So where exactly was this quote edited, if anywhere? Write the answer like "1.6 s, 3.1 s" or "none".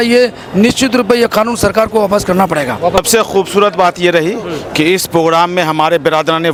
none